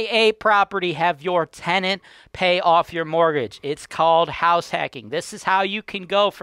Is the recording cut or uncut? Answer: uncut